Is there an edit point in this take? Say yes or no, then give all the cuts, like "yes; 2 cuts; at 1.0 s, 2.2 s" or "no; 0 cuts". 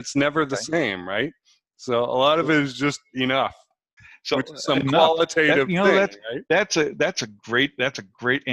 yes; 1 cut; at 4.0 s